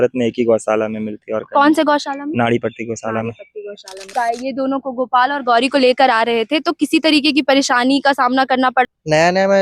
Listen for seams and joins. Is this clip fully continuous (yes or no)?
no